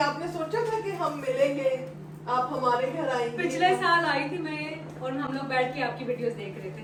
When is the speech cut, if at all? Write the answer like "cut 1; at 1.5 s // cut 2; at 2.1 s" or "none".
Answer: none